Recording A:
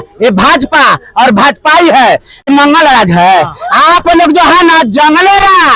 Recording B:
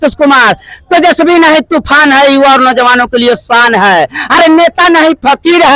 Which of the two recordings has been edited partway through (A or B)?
A